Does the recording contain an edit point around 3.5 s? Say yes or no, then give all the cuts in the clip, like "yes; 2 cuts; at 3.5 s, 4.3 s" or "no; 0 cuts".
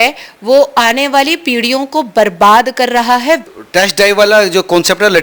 yes; 1 cut; at 3.5 s